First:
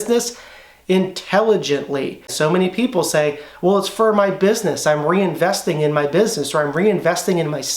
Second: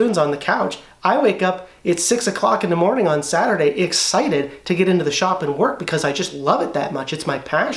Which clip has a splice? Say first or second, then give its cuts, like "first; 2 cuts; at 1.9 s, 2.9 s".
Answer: first; 1 cut; at 2.3 s